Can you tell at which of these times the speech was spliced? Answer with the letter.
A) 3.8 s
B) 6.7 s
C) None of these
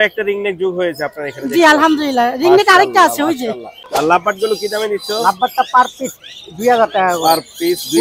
A